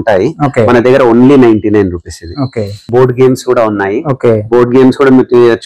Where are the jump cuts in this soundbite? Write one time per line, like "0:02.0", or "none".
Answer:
0:02.9